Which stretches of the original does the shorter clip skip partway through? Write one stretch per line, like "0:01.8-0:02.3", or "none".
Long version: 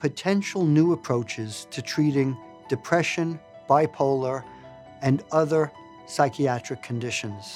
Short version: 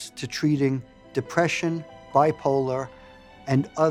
none